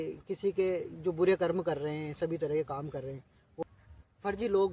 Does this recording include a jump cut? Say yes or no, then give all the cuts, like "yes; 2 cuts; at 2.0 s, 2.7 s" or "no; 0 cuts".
yes; 1 cut; at 3.6 s